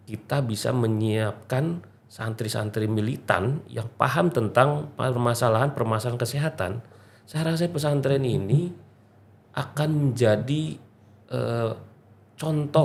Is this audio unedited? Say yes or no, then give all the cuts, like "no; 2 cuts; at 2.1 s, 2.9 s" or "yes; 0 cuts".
yes; 0 cuts